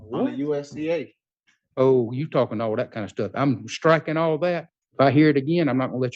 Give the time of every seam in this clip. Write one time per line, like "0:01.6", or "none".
0:04.8